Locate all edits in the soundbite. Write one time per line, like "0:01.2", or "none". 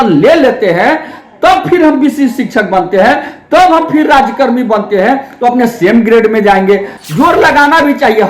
0:07.0